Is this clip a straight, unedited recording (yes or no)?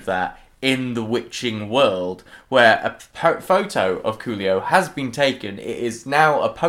yes